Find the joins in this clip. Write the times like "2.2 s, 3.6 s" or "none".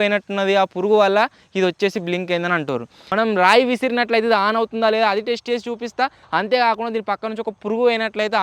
3.0 s